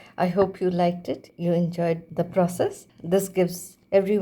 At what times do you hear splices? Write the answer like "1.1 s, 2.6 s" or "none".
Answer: 1.3 s, 2.1 s, 3.4 s